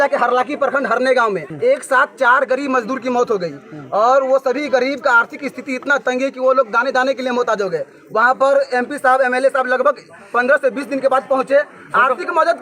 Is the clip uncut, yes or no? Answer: no